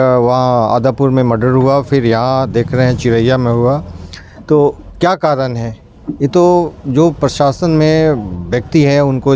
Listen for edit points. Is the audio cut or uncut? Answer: uncut